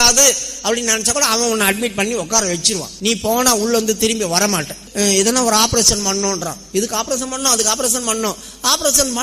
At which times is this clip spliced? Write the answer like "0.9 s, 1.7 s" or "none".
2.9 s, 4.8 s